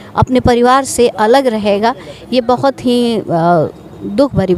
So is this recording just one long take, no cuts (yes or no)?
yes